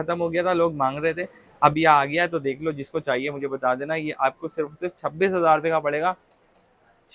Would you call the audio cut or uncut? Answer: uncut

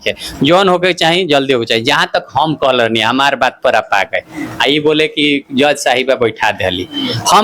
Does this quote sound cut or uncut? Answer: uncut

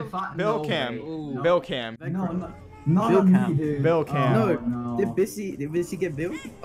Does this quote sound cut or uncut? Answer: uncut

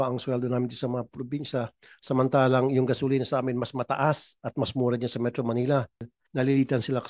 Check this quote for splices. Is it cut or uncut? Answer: cut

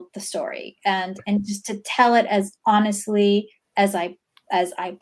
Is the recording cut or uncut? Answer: uncut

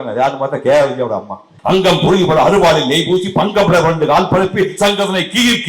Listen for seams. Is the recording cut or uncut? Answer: cut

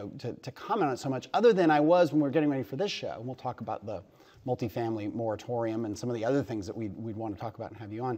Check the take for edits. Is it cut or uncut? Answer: uncut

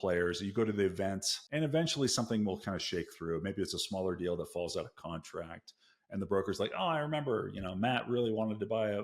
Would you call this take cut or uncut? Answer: cut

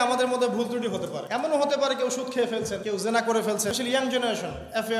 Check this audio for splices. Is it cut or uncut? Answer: cut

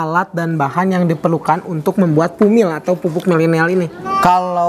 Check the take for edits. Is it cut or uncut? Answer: uncut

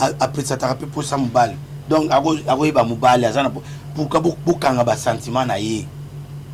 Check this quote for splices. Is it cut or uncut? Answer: uncut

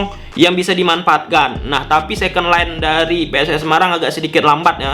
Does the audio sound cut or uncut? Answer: uncut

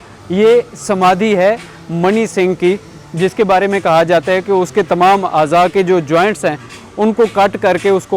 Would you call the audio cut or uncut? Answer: uncut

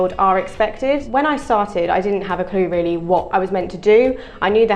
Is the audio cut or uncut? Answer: cut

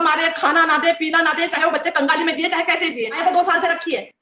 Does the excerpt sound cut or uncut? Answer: cut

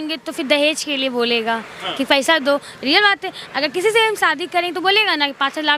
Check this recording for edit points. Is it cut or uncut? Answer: uncut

